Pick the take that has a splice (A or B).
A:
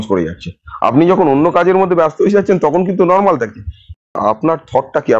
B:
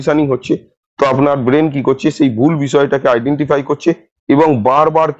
A